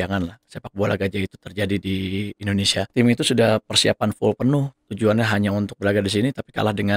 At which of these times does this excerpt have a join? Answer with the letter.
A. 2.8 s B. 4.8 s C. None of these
A